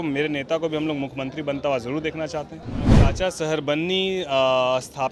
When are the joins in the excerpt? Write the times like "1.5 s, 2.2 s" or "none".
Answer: 3.1 s